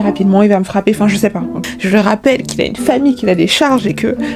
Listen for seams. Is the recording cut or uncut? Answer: cut